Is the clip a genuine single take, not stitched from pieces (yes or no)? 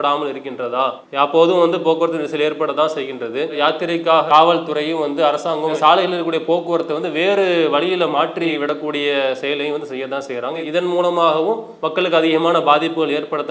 no